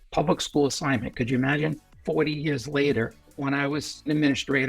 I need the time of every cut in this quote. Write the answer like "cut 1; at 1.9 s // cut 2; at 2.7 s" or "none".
cut 1; at 1.9 s // cut 2; at 3.7 s